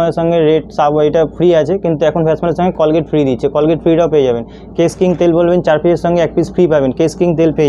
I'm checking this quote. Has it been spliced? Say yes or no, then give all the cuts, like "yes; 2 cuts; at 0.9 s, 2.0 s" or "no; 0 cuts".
no; 0 cuts